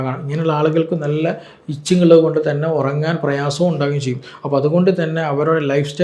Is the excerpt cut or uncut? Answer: uncut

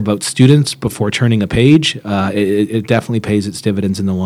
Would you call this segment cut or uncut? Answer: uncut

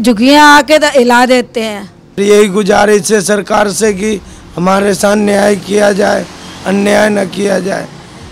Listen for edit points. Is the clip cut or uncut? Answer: cut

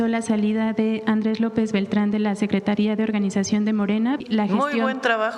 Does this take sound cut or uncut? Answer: cut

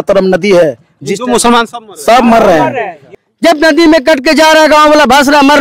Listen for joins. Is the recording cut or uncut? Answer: cut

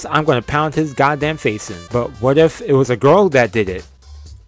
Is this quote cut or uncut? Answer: cut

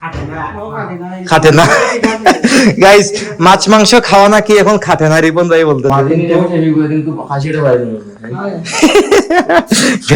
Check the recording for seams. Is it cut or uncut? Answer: cut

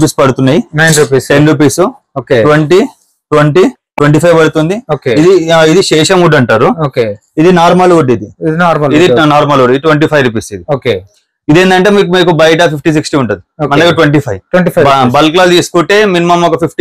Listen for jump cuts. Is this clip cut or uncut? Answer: uncut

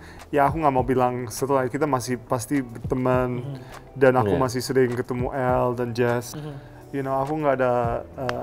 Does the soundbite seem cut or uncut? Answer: cut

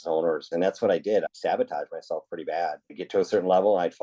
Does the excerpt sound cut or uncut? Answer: cut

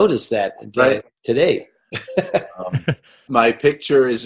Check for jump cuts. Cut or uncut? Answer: cut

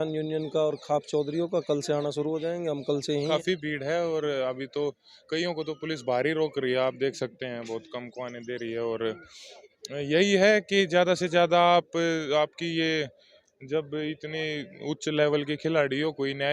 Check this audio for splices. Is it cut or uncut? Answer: cut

